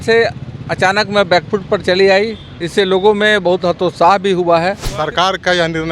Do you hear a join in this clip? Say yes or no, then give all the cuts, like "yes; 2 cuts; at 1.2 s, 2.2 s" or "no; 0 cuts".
yes; 1 cut; at 4.9 s